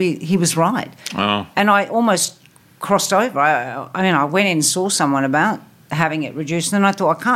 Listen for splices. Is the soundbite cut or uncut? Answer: uncut